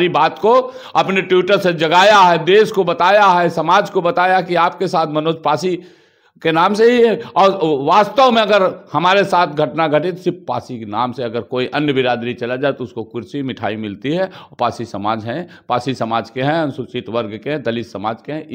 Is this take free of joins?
yes; 0 cuts

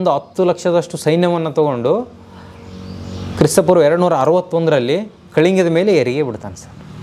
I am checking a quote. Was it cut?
no; 0 cuts

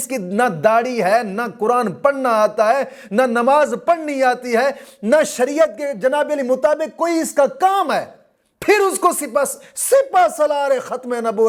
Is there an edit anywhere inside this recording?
no; 0 cuts

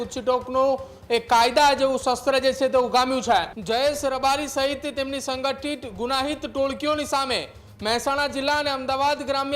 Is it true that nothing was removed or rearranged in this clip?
no; 1 cut; at 3.6 s

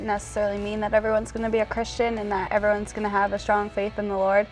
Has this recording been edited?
no; 0 cuts

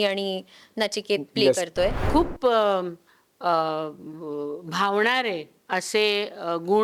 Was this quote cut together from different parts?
yes; 1 cut; at 2.0 s

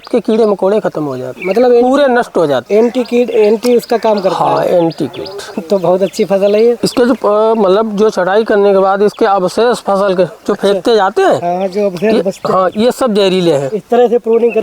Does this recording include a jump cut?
no; 0 cuts

